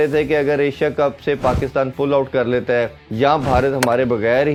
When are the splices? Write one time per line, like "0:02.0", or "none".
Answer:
none